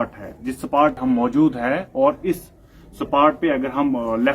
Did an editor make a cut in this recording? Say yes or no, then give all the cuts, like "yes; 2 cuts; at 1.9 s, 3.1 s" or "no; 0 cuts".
yes; 1 cut; at 1.0 s